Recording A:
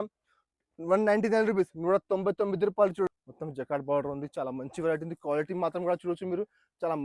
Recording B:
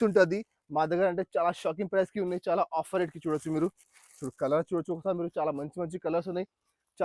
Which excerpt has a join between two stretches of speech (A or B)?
A